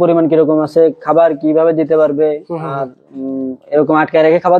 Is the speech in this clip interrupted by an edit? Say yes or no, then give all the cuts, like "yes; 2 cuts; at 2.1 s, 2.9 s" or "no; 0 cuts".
no; 0 cuts